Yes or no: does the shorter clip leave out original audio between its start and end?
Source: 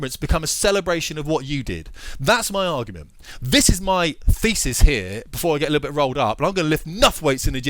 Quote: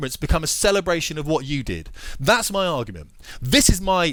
no